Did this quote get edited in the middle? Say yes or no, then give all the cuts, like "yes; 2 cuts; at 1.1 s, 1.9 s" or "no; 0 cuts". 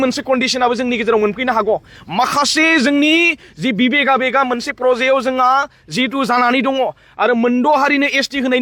no; 0 cuts